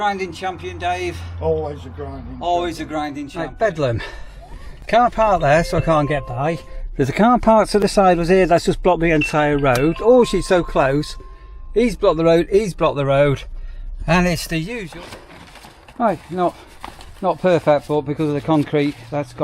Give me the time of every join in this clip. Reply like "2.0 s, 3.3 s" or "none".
3.3 s, 14.8 s